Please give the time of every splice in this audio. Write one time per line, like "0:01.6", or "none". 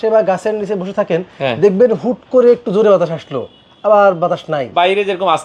none